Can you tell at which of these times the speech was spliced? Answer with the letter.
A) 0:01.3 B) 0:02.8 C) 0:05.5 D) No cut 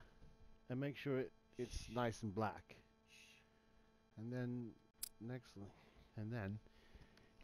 A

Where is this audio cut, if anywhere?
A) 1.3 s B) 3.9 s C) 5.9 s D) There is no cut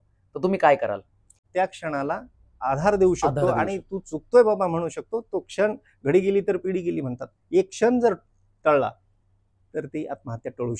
A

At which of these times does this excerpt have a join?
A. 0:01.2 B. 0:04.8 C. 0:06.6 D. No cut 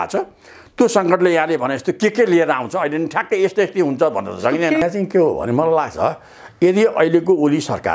B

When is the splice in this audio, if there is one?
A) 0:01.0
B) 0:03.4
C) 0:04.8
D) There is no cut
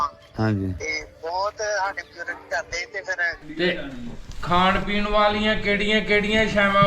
B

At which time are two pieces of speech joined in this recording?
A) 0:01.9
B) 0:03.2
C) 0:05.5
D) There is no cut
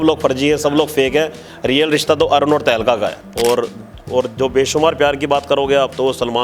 B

